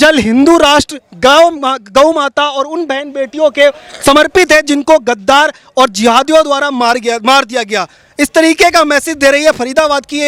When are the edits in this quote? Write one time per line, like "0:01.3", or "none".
none

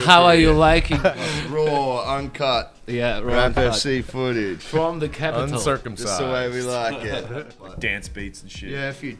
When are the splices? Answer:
0:01.0
0:07.4

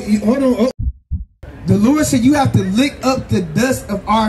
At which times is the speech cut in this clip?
0:00.9

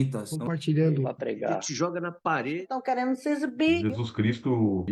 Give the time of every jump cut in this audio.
none

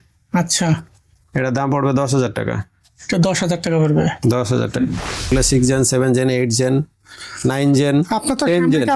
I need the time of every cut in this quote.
0:05.3

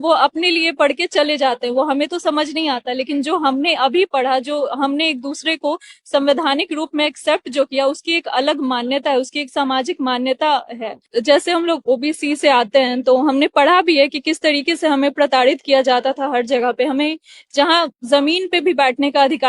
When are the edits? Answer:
0:11.1

